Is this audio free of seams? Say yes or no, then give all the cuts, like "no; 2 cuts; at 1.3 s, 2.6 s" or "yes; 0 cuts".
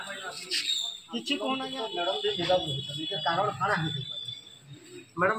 no; 1 cut; at 1.7 s